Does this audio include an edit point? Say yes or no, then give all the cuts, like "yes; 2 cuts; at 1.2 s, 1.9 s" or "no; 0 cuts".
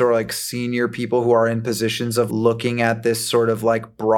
yes; 1 cut; at 2.3 s